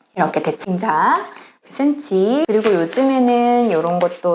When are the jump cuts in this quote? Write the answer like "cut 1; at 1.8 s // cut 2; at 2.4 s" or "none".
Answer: cut 1; at 1.6 s // cut 2; at 2.5 s